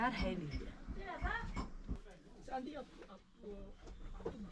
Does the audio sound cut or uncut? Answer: cut